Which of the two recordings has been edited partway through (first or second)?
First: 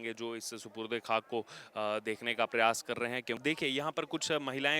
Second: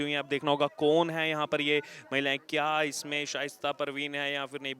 first